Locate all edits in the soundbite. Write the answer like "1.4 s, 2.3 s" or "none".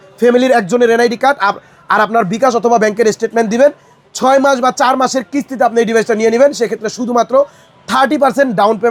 none